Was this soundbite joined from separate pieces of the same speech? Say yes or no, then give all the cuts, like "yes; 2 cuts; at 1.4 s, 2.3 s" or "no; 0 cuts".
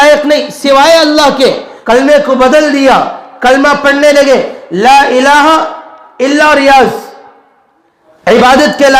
yes; 1 cut; at 1.7 s